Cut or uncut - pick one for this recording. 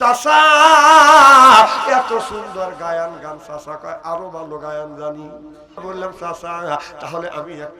cut